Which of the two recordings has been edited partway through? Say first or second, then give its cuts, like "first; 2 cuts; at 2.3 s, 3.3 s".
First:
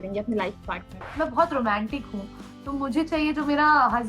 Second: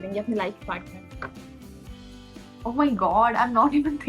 first; 1 cut; at 1.0 s